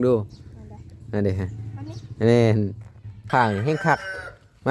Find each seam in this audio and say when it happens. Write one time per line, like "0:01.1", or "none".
0:03.2